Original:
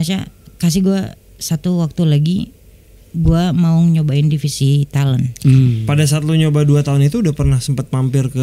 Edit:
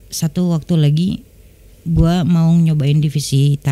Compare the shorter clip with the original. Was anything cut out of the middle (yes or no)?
no